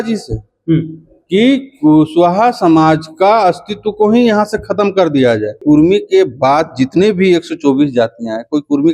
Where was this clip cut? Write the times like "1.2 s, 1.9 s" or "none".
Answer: 5.6 s